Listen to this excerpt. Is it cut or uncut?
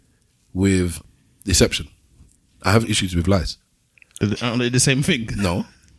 cut